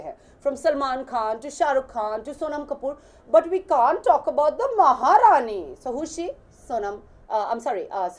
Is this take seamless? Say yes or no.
yes